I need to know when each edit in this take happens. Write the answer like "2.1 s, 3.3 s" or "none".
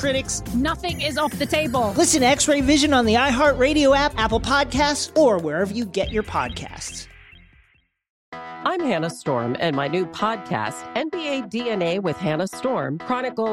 8.1 s